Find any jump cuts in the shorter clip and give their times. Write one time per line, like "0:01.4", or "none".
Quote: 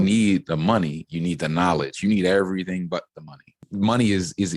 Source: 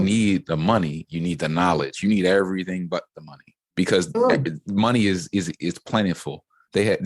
0:03.6